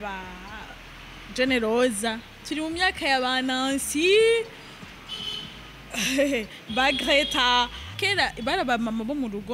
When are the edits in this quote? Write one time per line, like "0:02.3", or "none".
0:08.0